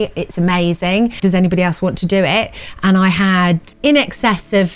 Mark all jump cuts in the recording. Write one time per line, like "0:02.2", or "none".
0:01.1
0:03.7